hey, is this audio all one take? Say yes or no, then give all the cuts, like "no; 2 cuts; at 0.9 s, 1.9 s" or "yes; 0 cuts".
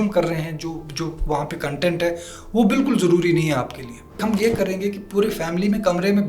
no; 1 cut; at 4.2 s